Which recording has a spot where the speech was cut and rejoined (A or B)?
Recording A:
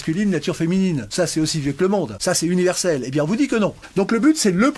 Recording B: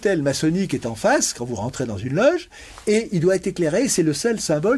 A